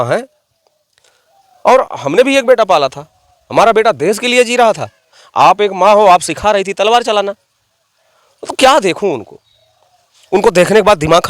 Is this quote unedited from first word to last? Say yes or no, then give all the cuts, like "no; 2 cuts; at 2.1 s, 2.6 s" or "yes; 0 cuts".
yes; 0 cuts